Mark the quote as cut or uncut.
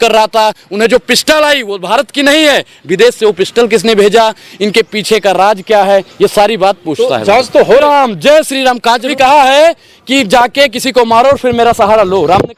cut